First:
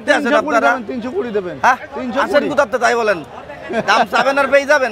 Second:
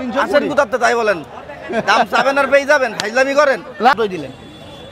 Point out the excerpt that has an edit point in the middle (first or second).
second